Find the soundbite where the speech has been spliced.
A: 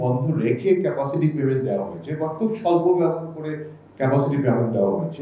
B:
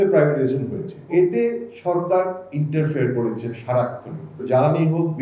B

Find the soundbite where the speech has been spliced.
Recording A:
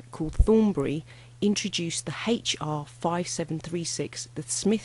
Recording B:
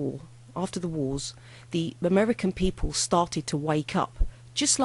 B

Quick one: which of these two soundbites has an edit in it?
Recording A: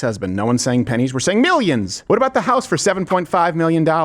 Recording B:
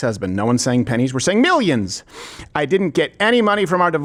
A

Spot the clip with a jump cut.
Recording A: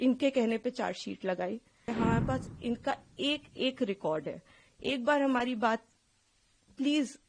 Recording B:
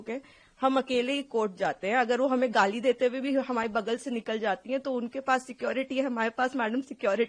A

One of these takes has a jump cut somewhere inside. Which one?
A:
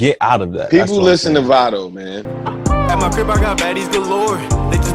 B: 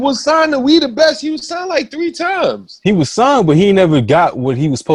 A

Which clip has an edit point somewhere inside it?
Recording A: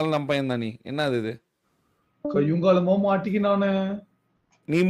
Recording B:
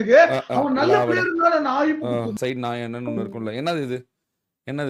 B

